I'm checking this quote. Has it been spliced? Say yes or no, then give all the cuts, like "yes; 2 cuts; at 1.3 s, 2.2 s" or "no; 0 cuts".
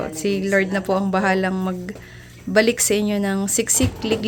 no; 0 cuts